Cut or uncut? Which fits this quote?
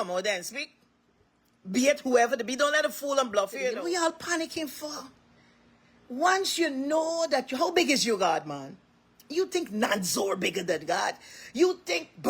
cut